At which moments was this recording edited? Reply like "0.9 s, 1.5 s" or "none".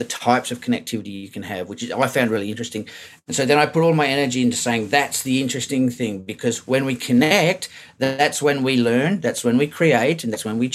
none